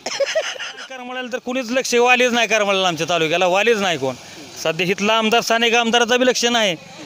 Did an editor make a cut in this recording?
yes; 1 cut; at 1.2 s

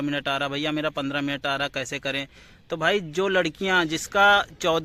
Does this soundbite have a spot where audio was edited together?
no; 0 cuts

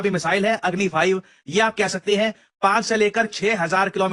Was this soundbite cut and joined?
no; 0 cuts

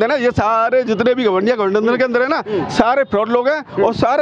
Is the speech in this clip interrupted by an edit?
no; 0 cuts

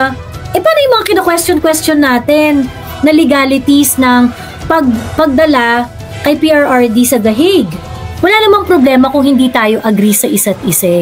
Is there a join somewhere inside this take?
yes; 1 cut; at 8.0 s

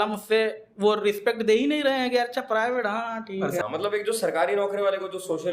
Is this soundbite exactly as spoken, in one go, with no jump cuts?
no; 1 cut; at 3.6 s

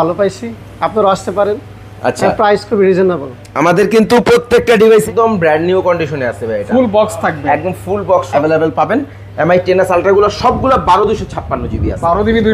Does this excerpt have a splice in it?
yes; 2 cuts; at 5.0 s, 8.3 s

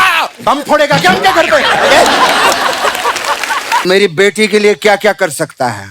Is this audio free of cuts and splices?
no; 1 cut; at 3.8 s

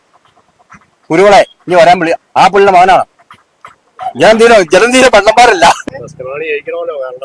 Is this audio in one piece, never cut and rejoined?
no; 1 cut; at 5.9 s

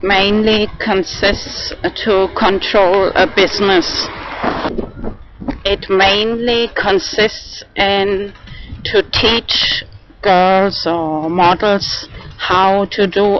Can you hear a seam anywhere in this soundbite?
yes; 1 cut; at 11.3 s

